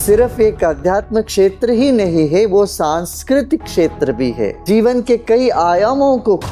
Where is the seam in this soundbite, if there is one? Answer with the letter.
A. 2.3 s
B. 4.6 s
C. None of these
B